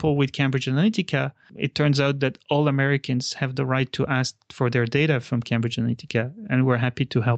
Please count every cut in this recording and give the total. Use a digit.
0